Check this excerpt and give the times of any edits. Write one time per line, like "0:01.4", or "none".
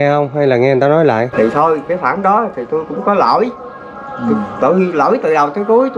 0:01.3

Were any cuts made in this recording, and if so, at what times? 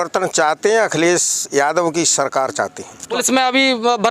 0:02.9

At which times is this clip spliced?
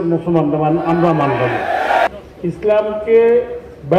0:02.1

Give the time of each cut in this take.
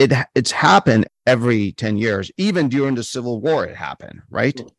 0:01.1

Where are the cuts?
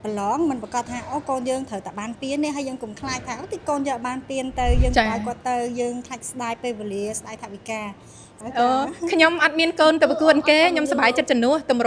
0:08.4

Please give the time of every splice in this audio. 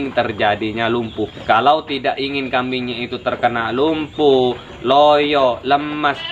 0:01.4

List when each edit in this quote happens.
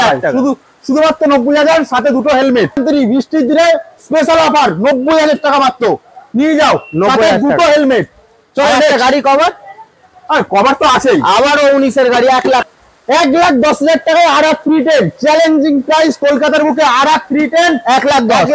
0:02.8
0:12.7

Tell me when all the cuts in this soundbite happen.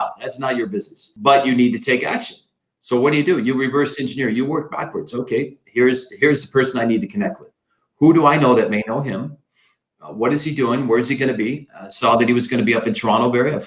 0:01.0

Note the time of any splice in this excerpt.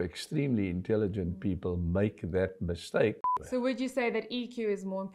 0:03.3

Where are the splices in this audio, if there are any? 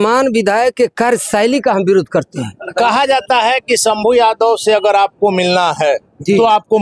0:02.7

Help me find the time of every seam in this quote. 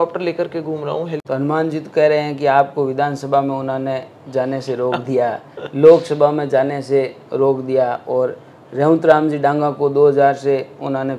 0:01.1

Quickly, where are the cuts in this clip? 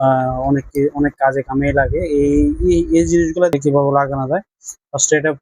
0:03.5

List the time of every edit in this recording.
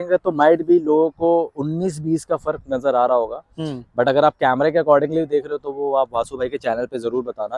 none

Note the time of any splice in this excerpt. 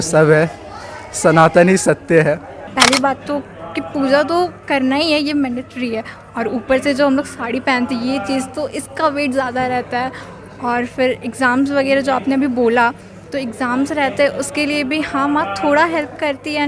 0:02.6

